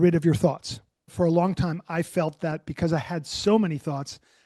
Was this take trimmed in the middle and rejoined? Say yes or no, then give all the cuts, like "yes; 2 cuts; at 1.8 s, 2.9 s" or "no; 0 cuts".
yes; 1 cut; at 1.1 s